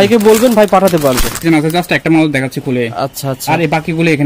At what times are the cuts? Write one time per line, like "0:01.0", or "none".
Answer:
0:01.3